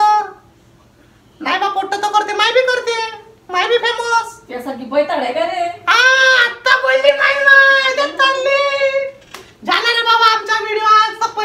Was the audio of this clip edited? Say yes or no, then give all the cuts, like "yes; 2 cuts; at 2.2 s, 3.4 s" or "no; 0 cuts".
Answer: no; 0 cuts